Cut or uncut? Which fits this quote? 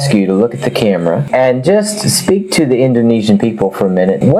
uncut